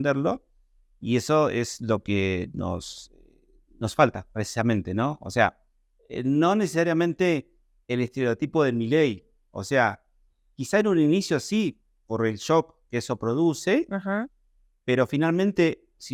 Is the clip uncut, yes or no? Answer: yes